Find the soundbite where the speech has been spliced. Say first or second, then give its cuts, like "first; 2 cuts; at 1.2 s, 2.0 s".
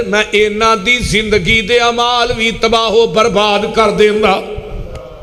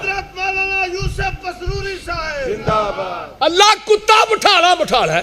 second; 1 cut; at 3.2 s